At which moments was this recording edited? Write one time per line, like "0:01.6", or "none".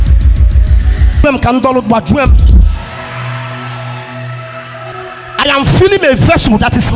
0:01.2